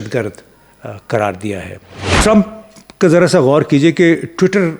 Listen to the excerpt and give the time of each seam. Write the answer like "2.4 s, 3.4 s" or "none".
2.1 s